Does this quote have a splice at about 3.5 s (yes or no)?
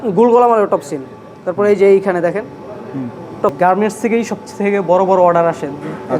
yes